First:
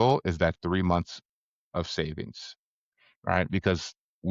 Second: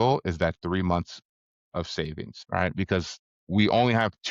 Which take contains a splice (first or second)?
second